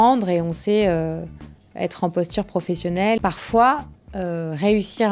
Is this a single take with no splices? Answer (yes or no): no